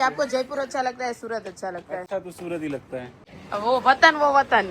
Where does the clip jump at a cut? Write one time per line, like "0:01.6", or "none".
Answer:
none